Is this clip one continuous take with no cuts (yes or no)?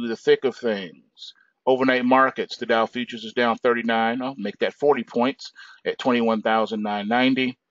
no